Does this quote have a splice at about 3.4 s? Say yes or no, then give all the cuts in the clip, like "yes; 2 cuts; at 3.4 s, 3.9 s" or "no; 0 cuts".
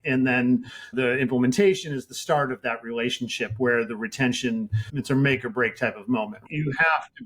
no; 3 cuts; at 0.9 s, 4.9 s, 6.5 s